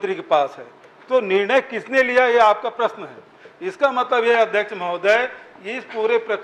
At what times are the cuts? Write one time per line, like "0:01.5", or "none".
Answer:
none